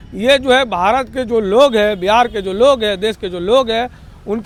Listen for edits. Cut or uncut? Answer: uncut